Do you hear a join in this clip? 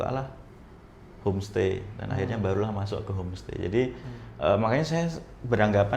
no; 0 cuts

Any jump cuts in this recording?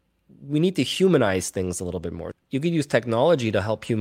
yes; 1 cut; at 2.2 s

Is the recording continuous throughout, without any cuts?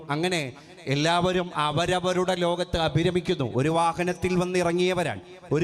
yes; 0 cuts

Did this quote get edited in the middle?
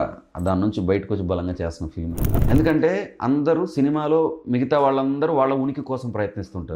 yes; 1 cut; at 2.3 s

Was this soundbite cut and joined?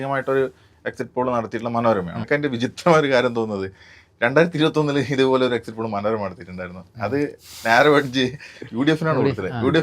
yes; 1 cut; at 2.2 s

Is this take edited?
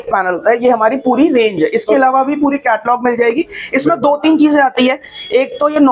no; 0 cuts

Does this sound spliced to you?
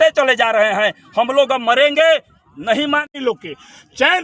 yes; 1 cut; at 3.1 s

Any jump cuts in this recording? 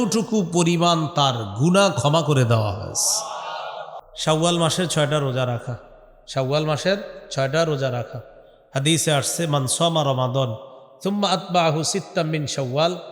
yes; 1 cut; at 4.1 s

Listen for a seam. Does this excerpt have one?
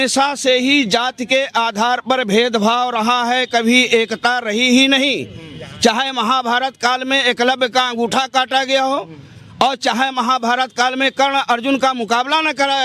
no; 0 cuts

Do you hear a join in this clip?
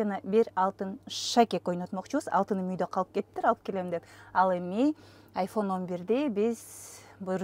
no; 0 cuts

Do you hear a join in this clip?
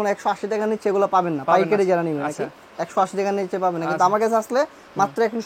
no; 0 cuts

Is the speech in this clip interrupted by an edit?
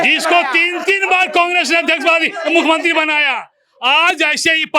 no; 0 cuts

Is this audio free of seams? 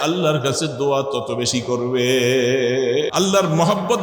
no; 1 cut; at 3.1 s

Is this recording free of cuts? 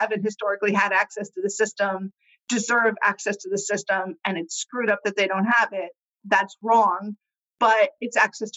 yes; 0 cuts

